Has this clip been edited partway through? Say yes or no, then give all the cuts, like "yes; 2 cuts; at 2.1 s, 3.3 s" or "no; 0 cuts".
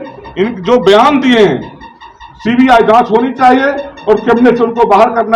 no; 0 cuts